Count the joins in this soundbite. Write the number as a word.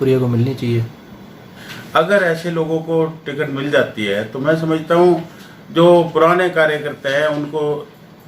one